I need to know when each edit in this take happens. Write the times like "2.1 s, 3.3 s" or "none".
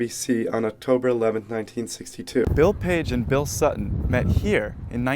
2.5 s

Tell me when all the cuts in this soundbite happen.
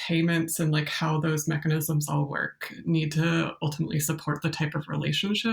none

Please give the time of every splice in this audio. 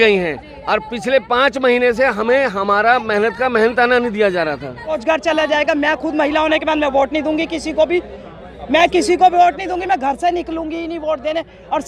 5.0 s

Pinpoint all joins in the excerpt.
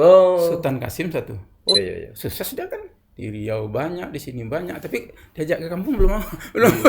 1.8 s

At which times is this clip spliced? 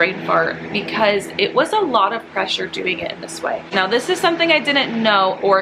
3.7 s

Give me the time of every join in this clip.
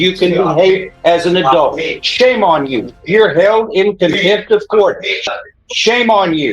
5.3 s

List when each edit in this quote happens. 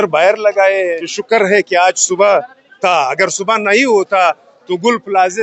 1.1 s

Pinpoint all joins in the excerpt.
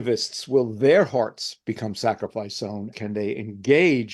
2.9 s

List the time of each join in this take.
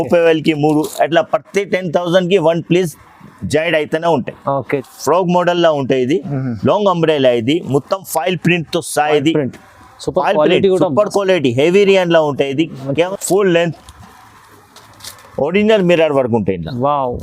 4.9 s, 13.1 s

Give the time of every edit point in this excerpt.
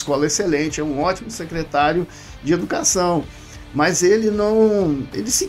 none

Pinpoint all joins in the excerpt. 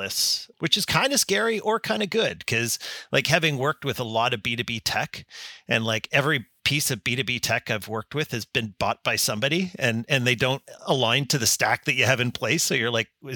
none

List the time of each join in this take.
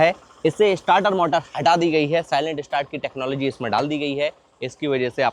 none

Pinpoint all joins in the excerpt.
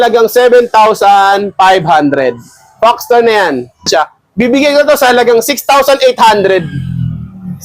3.9 s

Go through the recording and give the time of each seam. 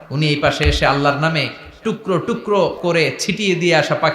2.8 s

